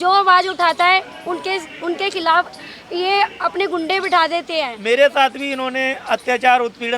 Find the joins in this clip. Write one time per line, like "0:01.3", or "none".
0:04.7